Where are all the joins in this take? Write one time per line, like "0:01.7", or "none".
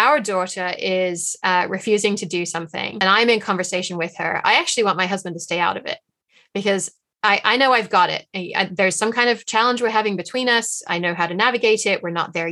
0:03.0